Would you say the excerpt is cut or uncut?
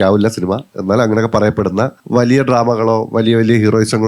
cut